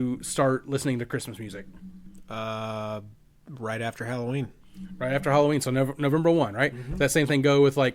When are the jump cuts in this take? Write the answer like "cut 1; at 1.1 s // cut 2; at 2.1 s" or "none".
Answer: none

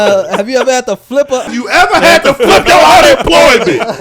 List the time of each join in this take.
cut 1; at 1.5 s

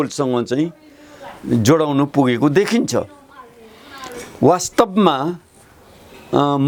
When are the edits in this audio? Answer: none

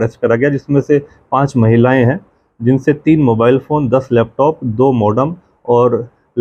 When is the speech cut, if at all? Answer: none

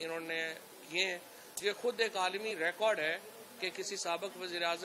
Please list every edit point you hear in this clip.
none

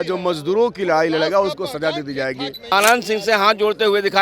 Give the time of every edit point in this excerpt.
cut 1; at 2.7 s

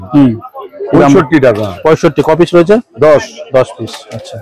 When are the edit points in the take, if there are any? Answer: none

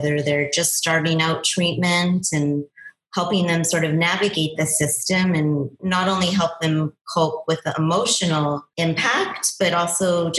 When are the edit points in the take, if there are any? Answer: cut 1; at 5.8 s

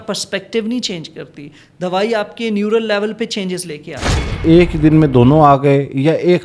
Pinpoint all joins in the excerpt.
cut 1; at 4.4 s

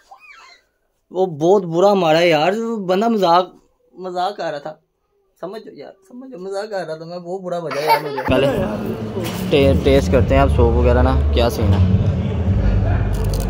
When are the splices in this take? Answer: cut 1; at 8.3 s

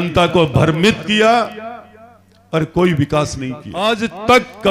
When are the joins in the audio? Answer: cut 1; at 3.8 s

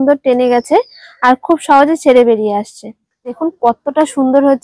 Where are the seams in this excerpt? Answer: cut 1; at 3.4 s

